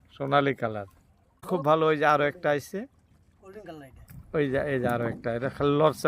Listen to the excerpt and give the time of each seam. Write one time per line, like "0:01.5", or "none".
0:01.4